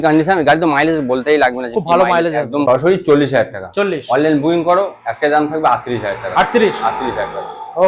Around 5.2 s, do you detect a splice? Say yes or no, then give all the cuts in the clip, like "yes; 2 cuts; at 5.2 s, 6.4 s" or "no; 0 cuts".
no; 1 cut; at 2.6 s